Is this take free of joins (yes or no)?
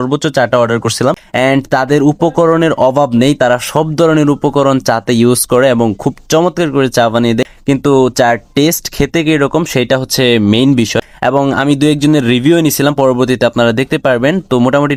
yes